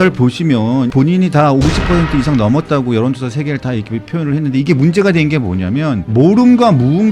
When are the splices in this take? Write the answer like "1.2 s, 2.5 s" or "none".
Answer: 0.9 s, 6.1 s